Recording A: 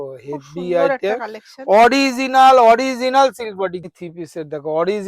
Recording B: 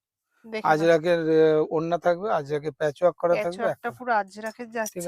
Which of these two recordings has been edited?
A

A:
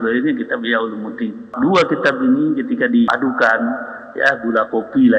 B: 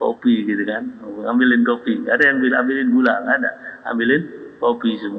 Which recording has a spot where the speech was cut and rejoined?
A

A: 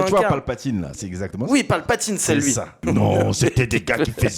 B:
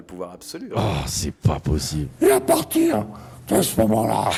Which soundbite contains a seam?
A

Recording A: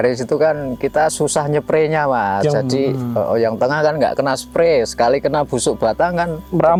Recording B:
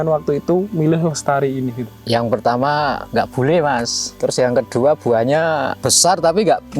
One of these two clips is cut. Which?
B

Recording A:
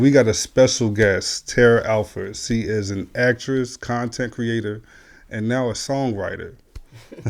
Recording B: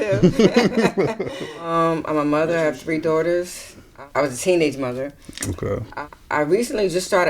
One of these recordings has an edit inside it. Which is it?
B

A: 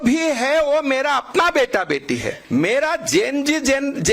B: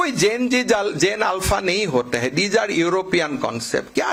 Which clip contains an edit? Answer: A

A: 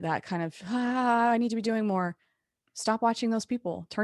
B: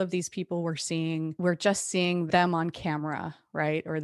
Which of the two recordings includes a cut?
B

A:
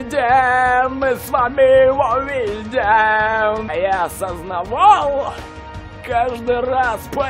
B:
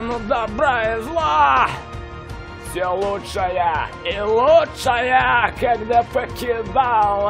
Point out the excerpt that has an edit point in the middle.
A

